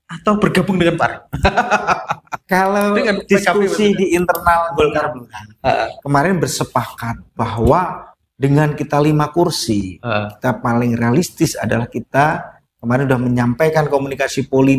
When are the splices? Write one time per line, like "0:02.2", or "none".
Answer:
none